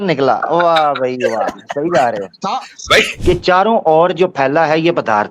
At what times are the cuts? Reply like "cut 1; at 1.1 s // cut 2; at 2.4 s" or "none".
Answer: cut 1; at 3.1 s